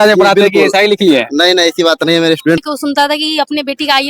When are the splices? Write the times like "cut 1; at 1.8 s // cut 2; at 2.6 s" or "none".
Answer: cut 1; at 2.6 s